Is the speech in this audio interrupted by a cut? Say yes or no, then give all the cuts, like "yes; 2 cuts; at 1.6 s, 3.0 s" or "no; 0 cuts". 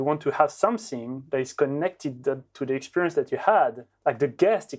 yes; 1 cut; at 3.9 s